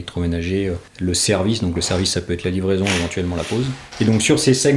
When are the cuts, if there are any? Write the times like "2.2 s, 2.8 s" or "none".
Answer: 0.9 s, 3.8 s